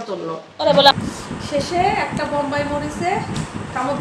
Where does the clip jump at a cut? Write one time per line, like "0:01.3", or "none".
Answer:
0:00.9